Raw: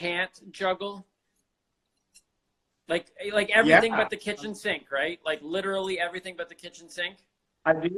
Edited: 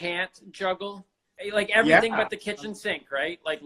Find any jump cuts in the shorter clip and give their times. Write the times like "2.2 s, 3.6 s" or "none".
1.3 s